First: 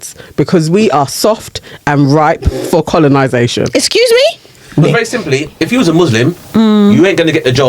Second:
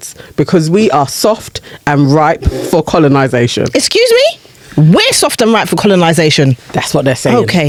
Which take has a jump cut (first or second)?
first